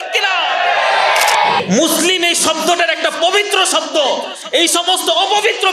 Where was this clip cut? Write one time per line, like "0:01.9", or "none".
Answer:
0:01.6